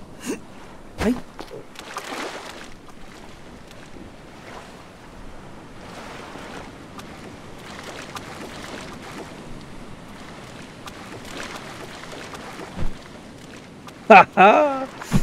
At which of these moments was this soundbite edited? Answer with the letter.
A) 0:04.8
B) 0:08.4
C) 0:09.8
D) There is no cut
D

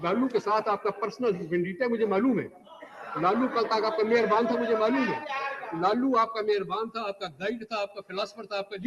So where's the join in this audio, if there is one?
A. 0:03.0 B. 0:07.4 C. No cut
C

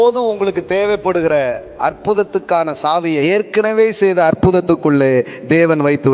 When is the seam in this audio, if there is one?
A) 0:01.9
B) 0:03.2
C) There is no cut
B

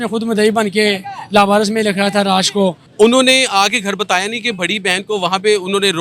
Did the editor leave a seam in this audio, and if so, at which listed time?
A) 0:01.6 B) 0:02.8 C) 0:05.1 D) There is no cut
B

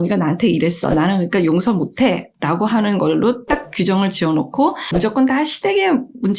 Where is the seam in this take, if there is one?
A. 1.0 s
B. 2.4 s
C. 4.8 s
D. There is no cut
C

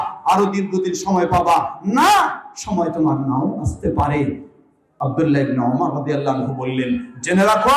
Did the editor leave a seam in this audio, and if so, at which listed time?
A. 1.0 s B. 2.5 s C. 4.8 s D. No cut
C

